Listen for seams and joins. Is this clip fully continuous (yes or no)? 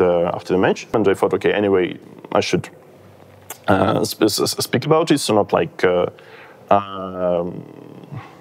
no